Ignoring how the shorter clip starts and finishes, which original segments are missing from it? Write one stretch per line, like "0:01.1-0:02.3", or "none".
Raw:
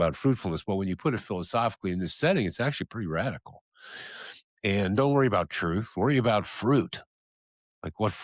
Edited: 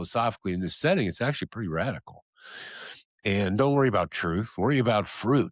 none

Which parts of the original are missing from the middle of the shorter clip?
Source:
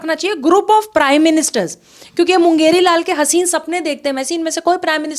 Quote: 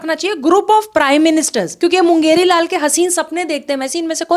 0:01.6-0:02.0

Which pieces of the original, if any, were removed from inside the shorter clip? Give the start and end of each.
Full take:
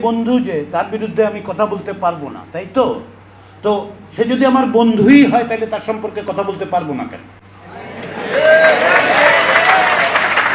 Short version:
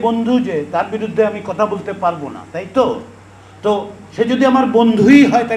none

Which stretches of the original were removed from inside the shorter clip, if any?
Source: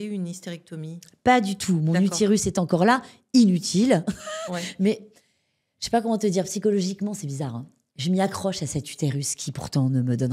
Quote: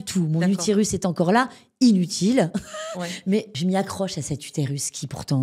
0:05.0-0:08.0

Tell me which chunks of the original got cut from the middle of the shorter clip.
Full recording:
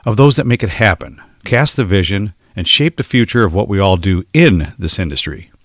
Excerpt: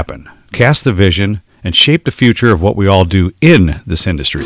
none

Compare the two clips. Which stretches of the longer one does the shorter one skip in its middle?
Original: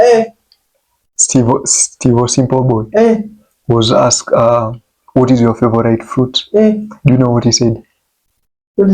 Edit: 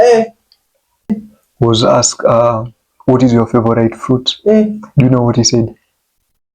0:01.2-0:03.3

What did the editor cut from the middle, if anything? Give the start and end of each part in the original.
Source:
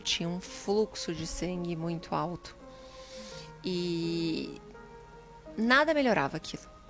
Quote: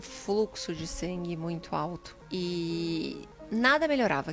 0:02.5-0:03.4
0:04.6-0:05.4

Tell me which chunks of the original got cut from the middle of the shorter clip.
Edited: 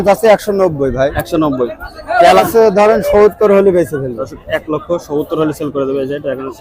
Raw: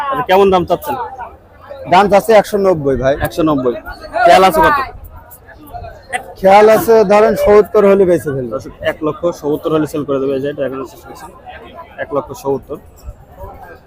0:04.5-0:06.8

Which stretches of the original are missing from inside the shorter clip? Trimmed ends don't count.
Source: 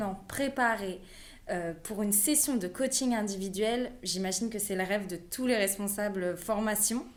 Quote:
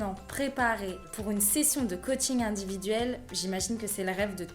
0:01.1-0:01.8

